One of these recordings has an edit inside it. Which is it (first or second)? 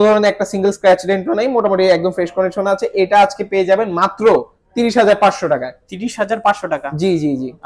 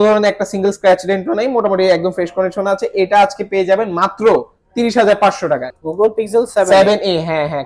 second